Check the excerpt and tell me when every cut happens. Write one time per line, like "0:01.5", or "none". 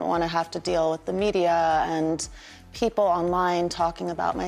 none

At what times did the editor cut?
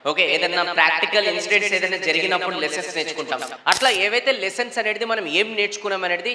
0:03.5

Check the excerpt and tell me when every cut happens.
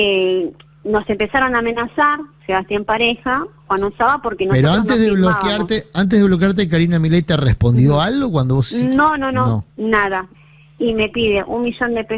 0:10.4

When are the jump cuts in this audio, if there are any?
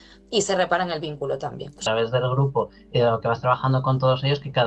0:01.8

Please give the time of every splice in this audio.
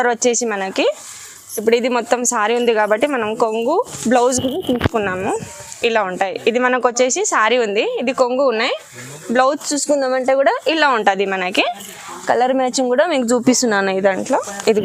none

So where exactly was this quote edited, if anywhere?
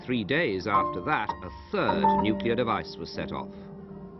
0:01.5

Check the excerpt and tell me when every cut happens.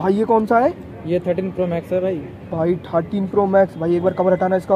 none

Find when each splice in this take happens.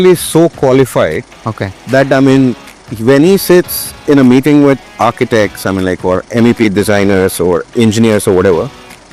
none

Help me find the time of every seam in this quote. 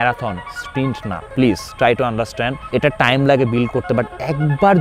0:01.2
0:02.6

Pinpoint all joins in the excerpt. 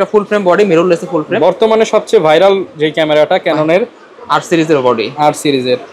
none

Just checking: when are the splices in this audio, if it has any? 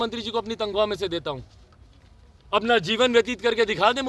none

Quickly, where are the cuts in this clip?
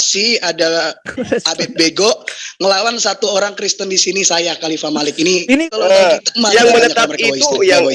0:05.6

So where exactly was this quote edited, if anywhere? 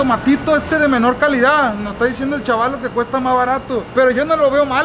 none

